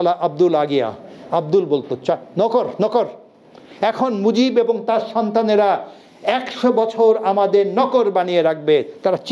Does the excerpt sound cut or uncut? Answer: uncut